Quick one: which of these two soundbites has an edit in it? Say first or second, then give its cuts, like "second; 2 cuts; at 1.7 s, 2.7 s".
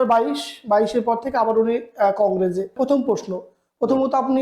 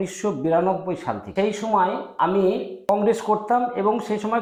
first; 1 cut; at 2.8 s